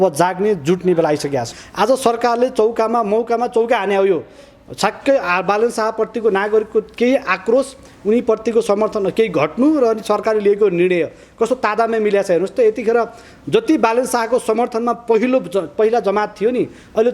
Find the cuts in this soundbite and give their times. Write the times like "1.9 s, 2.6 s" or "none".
1.6 s